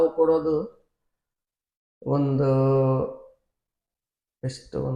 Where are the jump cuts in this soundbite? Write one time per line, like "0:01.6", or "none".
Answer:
none